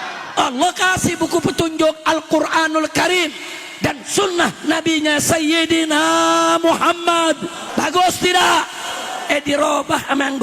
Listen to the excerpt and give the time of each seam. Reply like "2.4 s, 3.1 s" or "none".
7.6 s